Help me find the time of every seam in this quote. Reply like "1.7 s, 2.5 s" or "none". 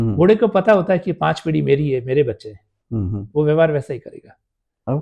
none